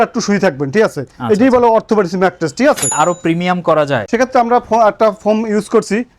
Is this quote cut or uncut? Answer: cut